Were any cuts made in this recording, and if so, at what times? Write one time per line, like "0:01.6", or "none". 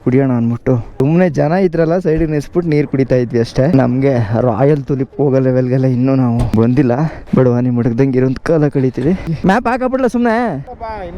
0:01.0
0:07.2
0:09.4